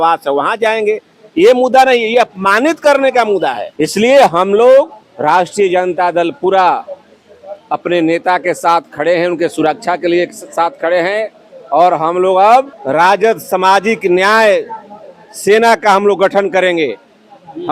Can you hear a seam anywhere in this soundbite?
yes; 3 cuts; at 3.6 s, 5.0 s, 12.8 s

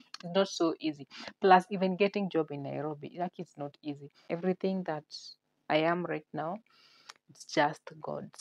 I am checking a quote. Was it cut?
yes; 1 cut; at 4.2 s

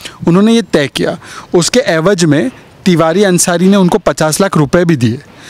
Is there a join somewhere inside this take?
no; 0 cuts

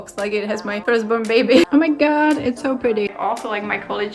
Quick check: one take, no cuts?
no; 2 cuts; at 1.7 s, 3.1 s

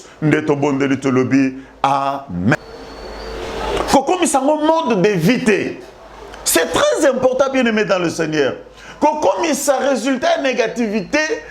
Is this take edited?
yes; 1 cut; at 2.6 s

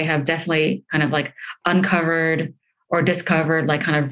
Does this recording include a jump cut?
no; 0 cuts

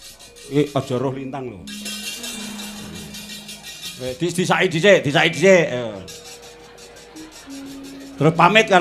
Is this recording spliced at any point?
no; 0 cuts

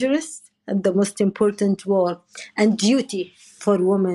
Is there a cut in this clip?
no; 0 cuts

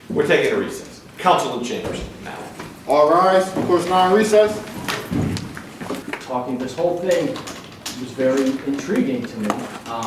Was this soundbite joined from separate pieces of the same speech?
yes; 1 cut; at 6.0 s

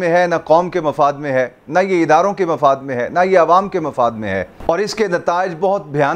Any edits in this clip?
no; 0 cuts

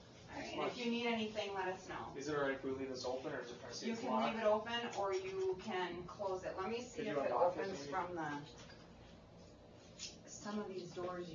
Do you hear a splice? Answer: yes; 1 cut; at 10.5 s

